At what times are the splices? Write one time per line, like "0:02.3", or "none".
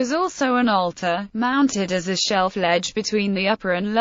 0:01.9